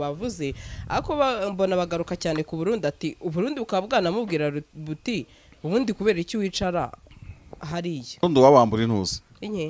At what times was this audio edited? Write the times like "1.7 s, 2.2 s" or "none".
8.2 s